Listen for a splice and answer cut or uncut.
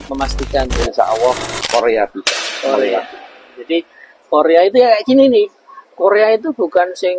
uncut